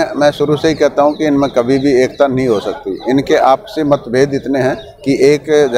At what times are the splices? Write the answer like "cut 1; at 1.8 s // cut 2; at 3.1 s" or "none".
none